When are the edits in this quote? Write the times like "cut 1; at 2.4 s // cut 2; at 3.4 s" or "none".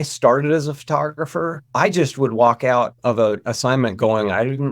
cut 1; at 2.9 s